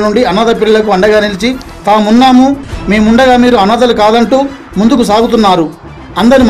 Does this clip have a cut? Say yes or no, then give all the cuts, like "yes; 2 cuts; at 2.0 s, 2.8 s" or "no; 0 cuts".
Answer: no; 0 cuts